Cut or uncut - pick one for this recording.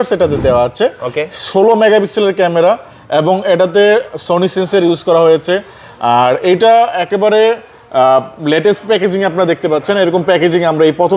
uncut